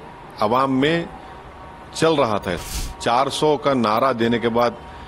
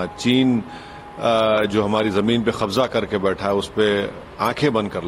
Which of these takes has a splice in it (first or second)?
first